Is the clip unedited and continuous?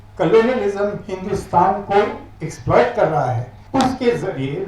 no; 1 cut; at 3.6 s

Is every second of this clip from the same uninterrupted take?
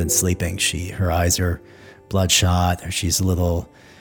yes; 0 cuts

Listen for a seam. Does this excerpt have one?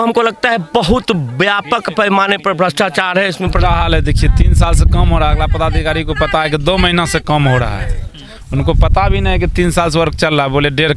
yes; 1 cut; at 3.6 s

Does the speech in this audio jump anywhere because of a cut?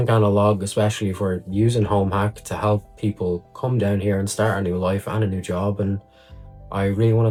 no; 0 cuts

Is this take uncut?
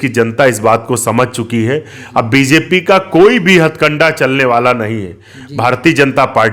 yes; 0 cuts

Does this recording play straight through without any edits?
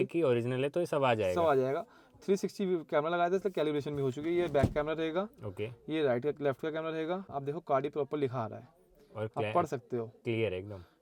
yes; 0 cuts

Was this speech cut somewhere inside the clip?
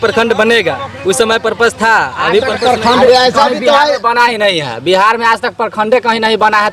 yes; 1 cut; at 2.5 s

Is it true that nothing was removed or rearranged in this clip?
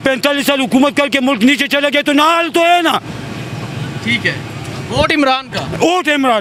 yes; 0 cuts

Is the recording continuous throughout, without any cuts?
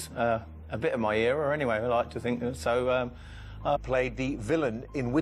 yes; 0 cuts

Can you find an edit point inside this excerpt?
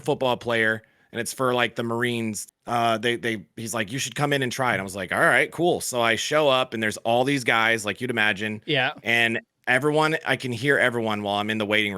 yes; 1 cut; at 2.5 s

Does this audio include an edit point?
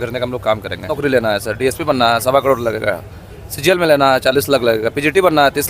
yes; 1 cut; at 0.9 s

